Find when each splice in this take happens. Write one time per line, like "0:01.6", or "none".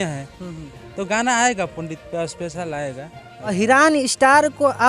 0:03.5